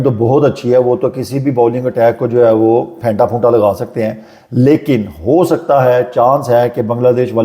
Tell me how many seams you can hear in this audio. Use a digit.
0